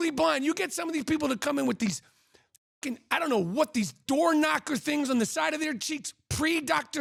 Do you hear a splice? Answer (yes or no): no